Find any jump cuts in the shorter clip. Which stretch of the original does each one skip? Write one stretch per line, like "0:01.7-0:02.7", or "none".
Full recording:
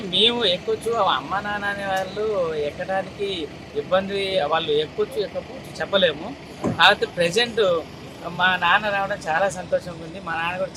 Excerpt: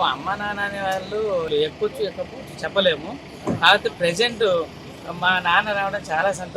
0:02.5-0:04.7